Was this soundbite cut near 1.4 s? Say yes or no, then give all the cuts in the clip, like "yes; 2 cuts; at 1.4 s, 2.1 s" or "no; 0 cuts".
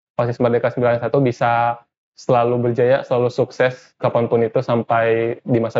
no; 0 cuts